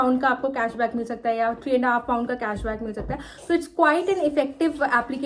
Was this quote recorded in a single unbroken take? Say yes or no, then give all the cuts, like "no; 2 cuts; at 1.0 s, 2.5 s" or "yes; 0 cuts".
yes; 0 cuts